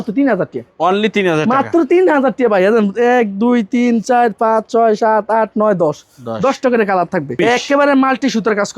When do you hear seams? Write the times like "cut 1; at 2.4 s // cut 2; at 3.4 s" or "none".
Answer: cut 1; at 7.4 s

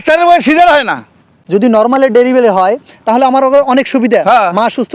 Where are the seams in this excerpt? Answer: cut 1; at 1.3 s

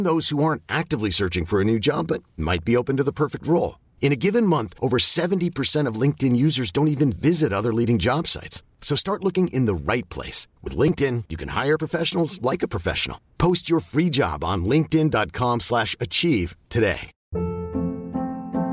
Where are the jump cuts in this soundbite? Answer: cut 1; at 17.1 s

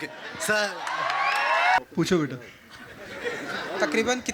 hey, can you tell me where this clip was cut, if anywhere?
cut 1; at 1.8 s

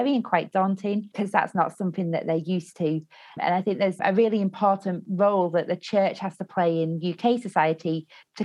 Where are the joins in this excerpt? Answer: cut 1; at 3.3 s

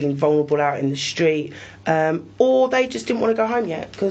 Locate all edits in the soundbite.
none

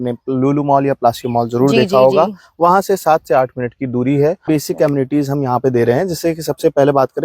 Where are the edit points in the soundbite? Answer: cut 1; at 4.4 s

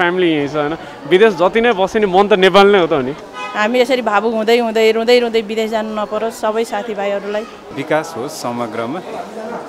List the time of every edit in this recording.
cut 1; at 3.2 s // cut 2; at 7.6 s

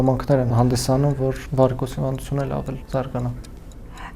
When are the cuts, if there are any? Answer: cut 1; at 1.0 s // cut 2; at 2.8 s

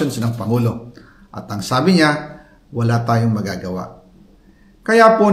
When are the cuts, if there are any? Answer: none

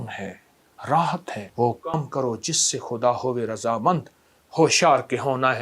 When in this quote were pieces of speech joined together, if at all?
cut 1; at 1.4 s

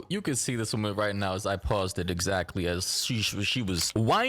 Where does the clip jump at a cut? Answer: cut 1; at 2.5 s

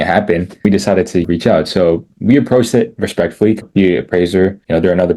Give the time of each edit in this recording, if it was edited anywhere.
cut 1; at 1.2 s // cut 2; at 3.6 s

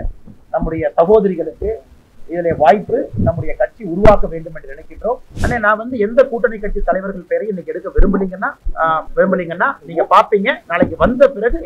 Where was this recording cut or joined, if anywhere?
cut 1; at 5.3 s // cut 2; at 9.0 s // cut 3; at 10.6 s

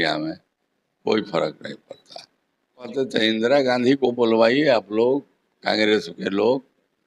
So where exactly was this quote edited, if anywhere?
cut 1; at 2.9 s

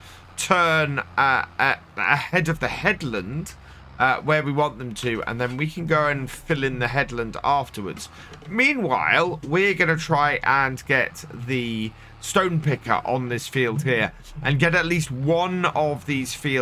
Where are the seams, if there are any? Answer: none

